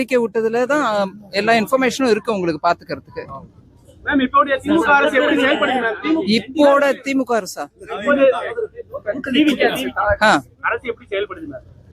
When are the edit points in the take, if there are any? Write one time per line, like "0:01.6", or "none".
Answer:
0:01.7